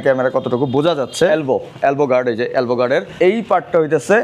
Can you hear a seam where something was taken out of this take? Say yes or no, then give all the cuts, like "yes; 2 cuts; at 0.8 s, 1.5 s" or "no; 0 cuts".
yes; 2 cuts; at 1.3 s, 3.1 s